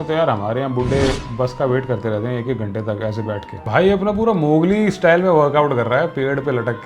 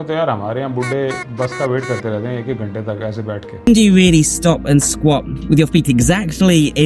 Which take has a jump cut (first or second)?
first